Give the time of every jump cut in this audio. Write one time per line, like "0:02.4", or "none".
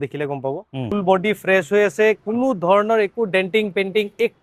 0:00.9